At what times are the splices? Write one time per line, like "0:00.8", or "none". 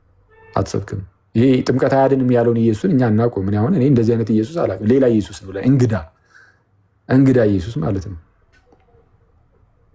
none